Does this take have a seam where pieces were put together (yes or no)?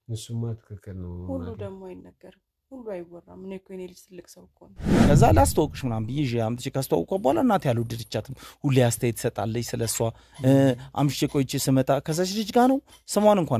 yes